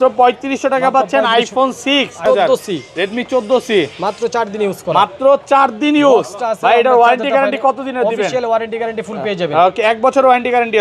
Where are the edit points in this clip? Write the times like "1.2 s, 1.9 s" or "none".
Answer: 2.2 s